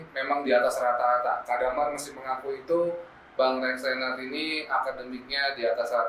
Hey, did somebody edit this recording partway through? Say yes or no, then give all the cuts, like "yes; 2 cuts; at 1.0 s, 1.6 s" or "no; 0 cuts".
no; 0 cuts